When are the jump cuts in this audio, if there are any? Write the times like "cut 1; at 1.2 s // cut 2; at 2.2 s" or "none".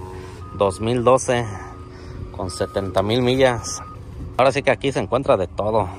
cut 1; at 4.4 s